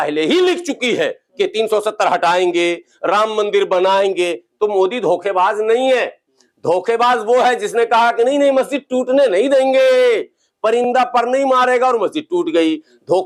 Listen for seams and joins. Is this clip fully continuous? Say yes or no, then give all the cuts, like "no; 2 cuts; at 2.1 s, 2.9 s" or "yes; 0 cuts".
yes; 0 cuts